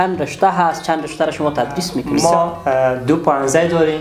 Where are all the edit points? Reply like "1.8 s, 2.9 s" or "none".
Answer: 2.0 s